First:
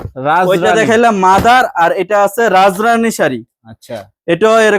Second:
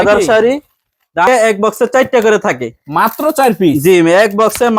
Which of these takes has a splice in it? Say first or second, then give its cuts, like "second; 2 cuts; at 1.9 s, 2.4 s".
second; 1 cut; at 1.3 s